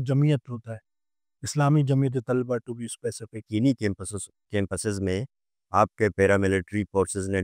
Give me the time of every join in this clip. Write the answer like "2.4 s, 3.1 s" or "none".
3.5 s